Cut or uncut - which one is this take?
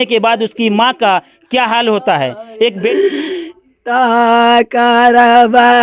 cut